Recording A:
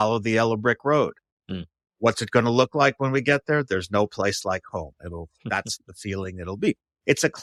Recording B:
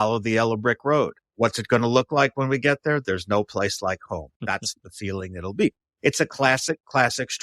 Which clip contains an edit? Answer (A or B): B